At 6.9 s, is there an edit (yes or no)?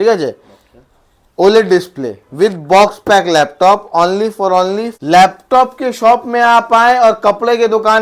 no